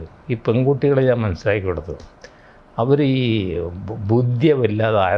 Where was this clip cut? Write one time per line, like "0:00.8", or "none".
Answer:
none